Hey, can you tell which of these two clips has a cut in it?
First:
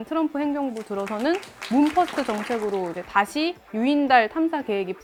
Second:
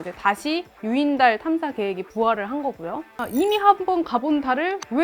second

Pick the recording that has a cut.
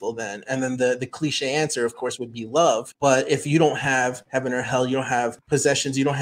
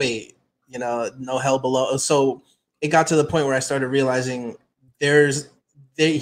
first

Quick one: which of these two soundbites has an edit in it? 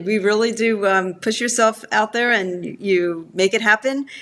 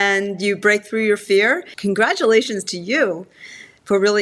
second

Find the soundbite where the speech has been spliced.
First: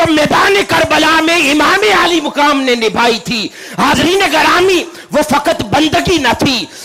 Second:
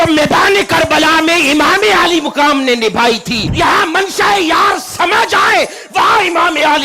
second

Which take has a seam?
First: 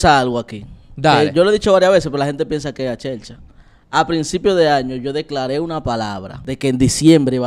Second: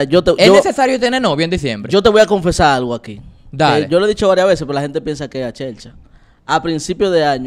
first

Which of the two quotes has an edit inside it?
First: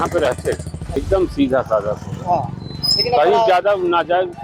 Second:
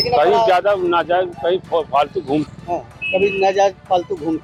first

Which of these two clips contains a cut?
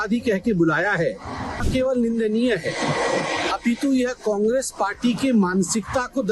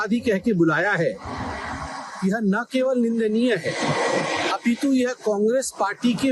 first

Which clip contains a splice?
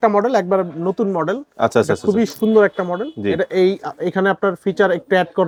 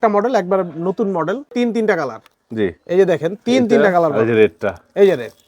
second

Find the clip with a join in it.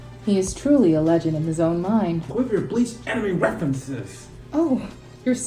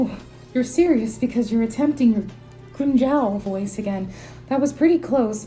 first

